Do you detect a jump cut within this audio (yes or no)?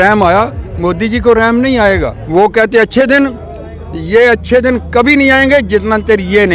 yes